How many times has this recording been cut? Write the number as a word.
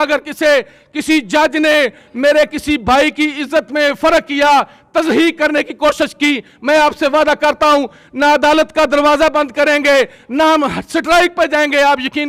zero